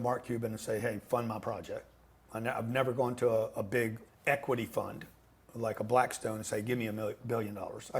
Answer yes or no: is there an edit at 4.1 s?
yes